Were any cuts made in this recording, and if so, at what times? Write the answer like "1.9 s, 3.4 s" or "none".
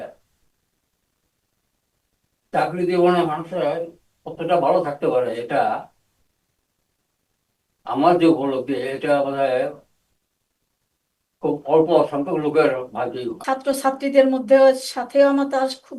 13.4 s